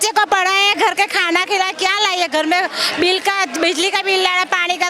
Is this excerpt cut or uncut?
uncut